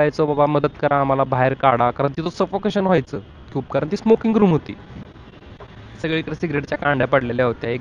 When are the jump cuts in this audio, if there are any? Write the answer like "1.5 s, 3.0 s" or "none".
none